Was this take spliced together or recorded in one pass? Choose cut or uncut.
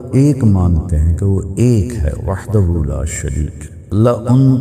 cut